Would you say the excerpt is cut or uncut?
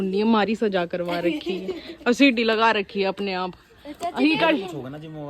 uncut